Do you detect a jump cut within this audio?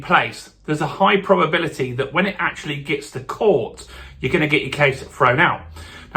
no; 0 cuts

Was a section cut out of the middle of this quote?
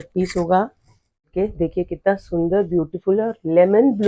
yes; 1 cut; at 1.3 s

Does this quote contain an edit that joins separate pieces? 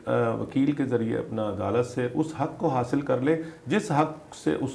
no; 0 cuts

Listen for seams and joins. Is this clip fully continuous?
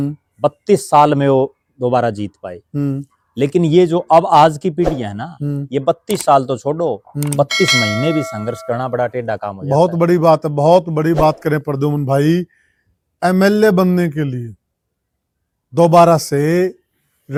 yes; 0 cuts

